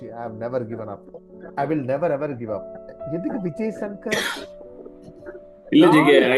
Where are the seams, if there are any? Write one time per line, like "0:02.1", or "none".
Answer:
0:02.9